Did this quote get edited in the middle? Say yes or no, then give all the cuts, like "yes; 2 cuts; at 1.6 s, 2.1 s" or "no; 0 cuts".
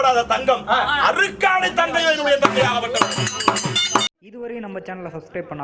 yes; 1 cut; at 4.2 s